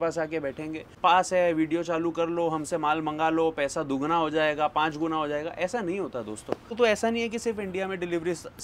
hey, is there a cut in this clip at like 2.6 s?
no; 2 cuts; at 0.9 s, 6.7 s

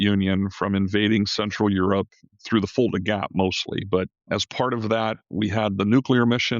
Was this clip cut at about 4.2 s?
yes; 1 cut; at 4.2 s

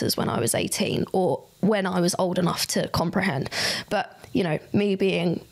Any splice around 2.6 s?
no; 0 cuts

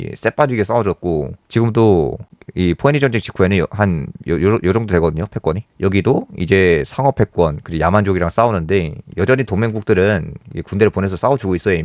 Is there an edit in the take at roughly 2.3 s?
no; 0 cuts

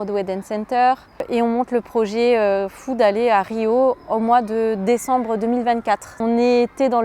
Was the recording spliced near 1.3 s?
yes; 2 cuts; at 1.3 s, 6.1 s

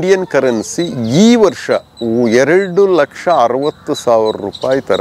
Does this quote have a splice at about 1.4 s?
no; 0 cuts

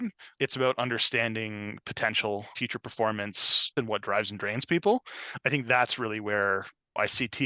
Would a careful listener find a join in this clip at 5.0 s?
no; 2 cuts; at 2.5 s, 3.7 s

